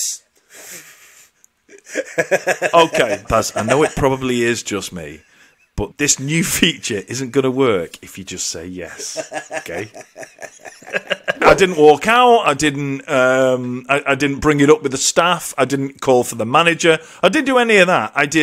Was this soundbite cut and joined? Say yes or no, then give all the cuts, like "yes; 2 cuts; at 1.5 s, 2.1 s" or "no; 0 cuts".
yes; 3 cuts; at 3.3 s, 5.9 s, 11.4 s